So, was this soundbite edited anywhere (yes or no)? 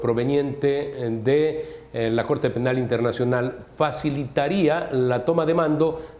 no